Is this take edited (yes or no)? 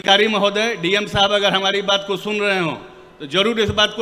no